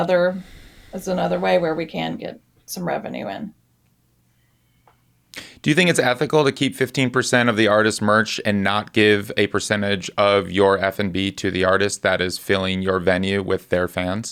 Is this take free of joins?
yes; 0 cuts

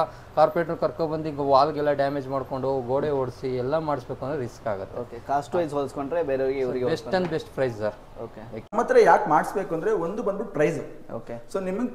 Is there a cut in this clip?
yes; 1 cut; at 8.7 s

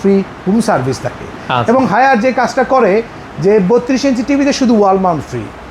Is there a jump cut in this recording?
no; 0 cuts

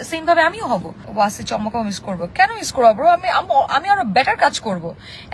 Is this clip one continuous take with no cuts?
no; 1 cut; at 1.0 s

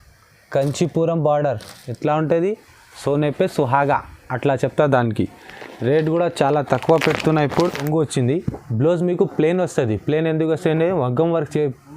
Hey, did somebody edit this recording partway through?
yes; 1 cut; at 7.9 s

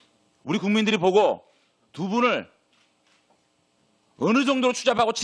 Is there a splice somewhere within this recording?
no; 0 cuts

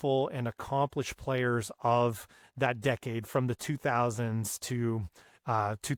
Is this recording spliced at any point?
no; 0 cuts

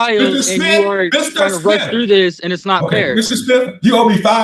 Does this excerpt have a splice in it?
no; 0 cuts

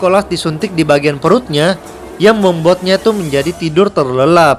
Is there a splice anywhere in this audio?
no; 0 cuts

